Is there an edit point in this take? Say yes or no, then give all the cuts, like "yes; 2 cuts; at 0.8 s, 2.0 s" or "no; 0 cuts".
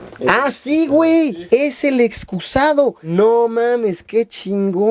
no; 0 cuts